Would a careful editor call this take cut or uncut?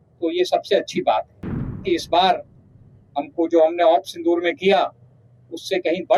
cut